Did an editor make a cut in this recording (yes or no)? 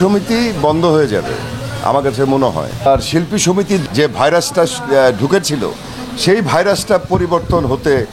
yes